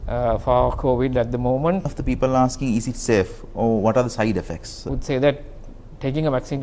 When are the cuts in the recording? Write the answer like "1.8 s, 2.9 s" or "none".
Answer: 2.0 s, 4.9 s